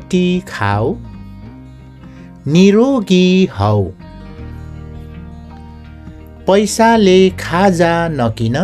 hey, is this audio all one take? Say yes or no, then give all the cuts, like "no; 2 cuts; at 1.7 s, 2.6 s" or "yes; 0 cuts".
yes; 0 cuts